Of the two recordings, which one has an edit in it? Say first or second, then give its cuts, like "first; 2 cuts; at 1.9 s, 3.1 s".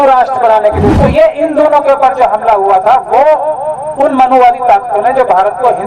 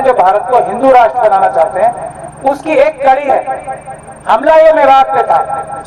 first; 1 cut; at 0.9 s